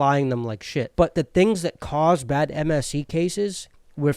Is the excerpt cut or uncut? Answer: cut